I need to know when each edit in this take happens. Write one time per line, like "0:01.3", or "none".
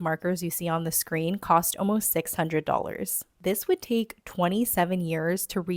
0:03.3